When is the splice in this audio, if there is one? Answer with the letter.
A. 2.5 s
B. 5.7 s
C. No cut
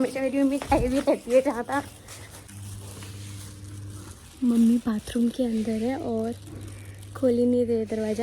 A